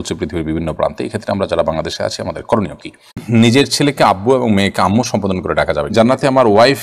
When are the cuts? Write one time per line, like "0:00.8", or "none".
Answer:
0:03.2
0:05.9